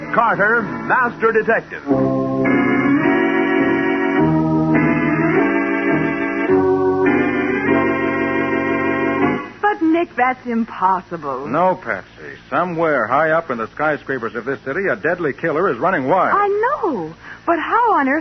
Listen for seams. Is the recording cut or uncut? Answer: uncut